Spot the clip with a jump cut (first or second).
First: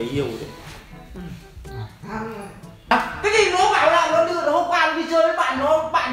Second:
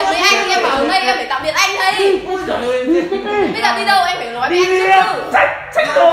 first